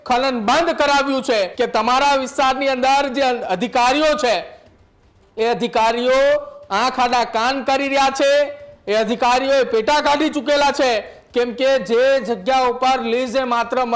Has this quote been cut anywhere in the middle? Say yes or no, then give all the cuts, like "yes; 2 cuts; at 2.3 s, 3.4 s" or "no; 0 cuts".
yes; 1 cut; at 1.5 s